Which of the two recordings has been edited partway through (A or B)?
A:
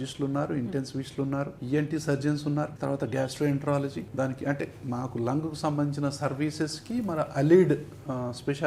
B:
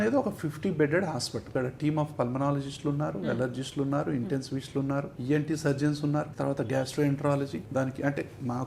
B